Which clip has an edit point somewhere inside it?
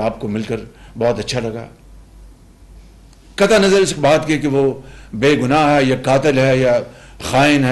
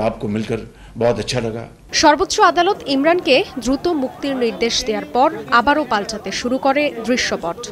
second; 1 cut; at 1.8 s

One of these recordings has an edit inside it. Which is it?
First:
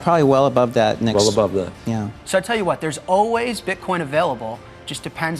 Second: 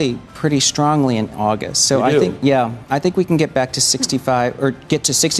first; 1 cut; at 2.1 s

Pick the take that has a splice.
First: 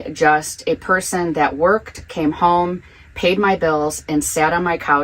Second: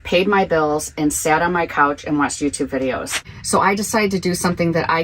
second; 1 cut; at 3.2 s

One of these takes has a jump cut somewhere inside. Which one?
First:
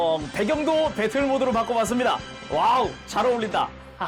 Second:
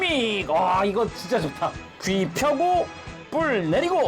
second; 1 cut; at 1.9 s

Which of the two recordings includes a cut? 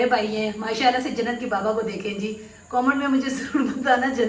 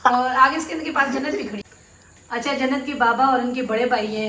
second; 1 cut; at 1.6 s

